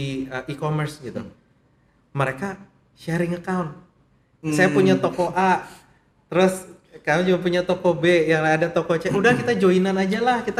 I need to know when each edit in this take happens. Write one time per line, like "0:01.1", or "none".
none

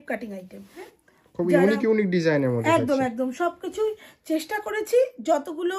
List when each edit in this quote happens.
0:00.9

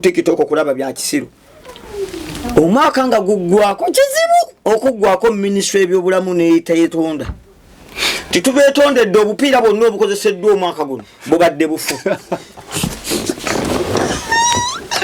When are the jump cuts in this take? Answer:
none

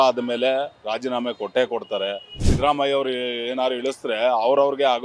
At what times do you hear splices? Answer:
0:02.4

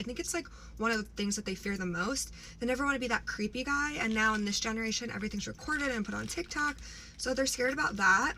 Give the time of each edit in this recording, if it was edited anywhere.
none

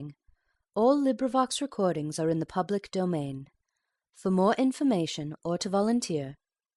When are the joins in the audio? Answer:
none

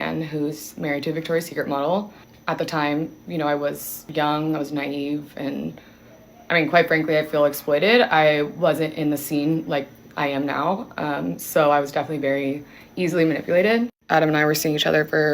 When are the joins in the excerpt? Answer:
0:03.9
0:14.0

